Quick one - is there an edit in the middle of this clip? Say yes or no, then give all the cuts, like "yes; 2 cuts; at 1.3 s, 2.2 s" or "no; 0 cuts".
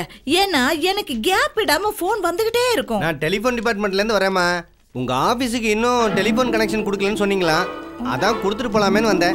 no; 0 cuts